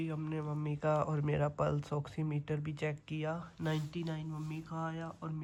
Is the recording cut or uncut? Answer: uncut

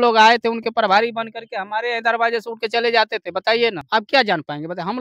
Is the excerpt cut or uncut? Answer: cut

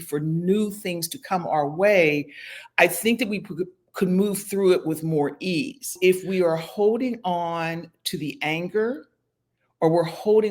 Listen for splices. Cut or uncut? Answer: cut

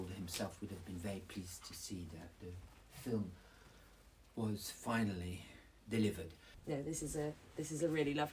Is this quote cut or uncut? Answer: cut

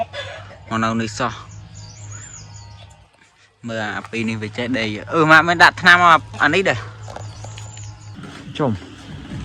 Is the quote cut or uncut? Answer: cut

